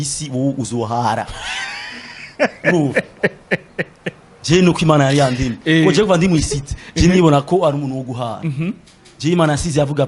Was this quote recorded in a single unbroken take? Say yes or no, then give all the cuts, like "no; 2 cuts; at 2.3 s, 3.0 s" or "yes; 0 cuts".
yes; 0 cuts